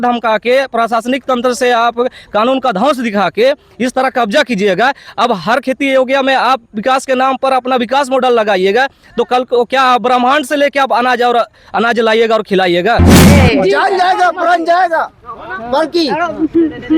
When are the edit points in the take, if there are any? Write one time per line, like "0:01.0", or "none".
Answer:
0:13.3